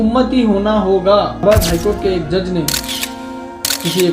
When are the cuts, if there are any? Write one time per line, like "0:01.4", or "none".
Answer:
0:01.4

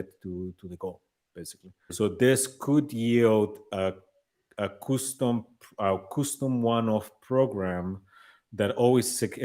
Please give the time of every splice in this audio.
0:01.9

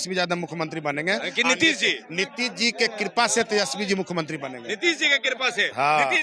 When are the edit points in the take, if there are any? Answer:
none

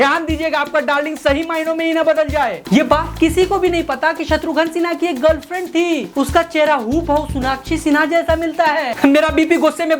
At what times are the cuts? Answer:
0:02.5
0:08.9

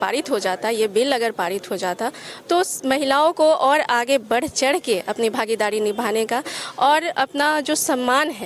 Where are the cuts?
none

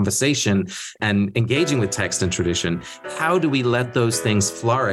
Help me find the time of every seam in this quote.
0:01.0

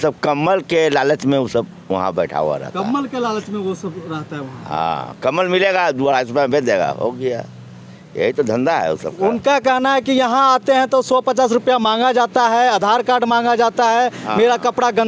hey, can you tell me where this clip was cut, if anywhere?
none

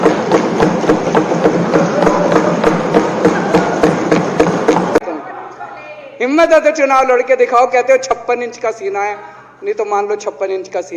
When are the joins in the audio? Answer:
0:05.0

